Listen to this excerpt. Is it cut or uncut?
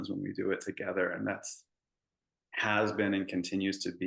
uncut